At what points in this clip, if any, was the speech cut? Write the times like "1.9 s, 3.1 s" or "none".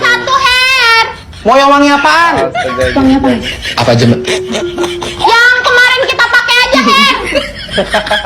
none